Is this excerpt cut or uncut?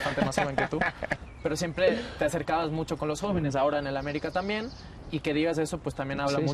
uncut